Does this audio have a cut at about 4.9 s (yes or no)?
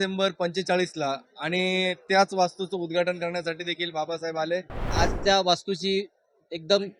yes